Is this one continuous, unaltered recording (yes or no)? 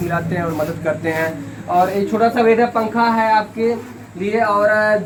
yes